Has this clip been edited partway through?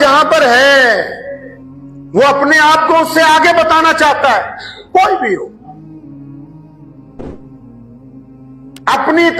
no; 0 cuts

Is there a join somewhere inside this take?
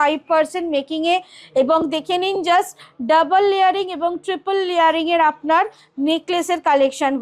no; 0 cuts

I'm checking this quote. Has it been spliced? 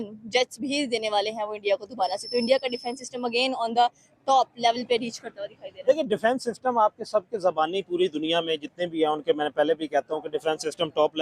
no; 0 cuts

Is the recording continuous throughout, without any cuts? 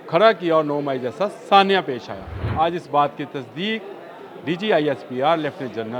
no; 1 cut; at 2.4 s

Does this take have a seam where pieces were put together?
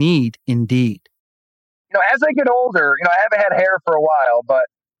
yes; 1 cut; at 1.4 s

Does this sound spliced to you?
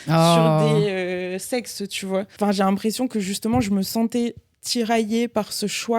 yes; 1 cut; at 2.3 s

